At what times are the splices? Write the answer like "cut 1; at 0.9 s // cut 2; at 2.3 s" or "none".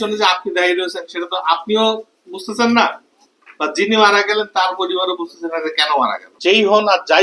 cut 1; at 6.3 s